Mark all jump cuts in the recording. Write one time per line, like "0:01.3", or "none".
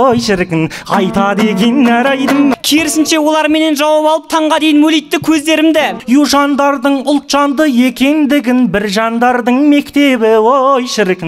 0:02.6
0:06.0